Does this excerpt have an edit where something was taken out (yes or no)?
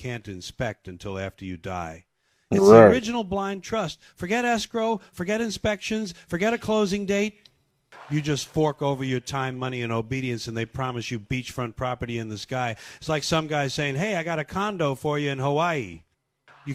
no